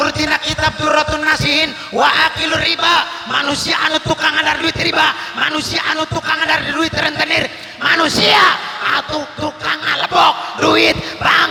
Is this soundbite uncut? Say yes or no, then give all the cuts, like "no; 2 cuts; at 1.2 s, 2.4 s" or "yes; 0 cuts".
yes; 0 cuts